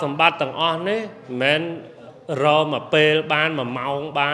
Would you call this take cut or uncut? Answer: uncut